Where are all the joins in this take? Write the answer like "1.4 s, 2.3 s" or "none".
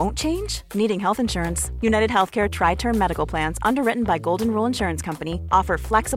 none